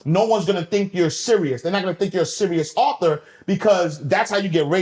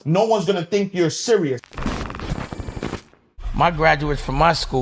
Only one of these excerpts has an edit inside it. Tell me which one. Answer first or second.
second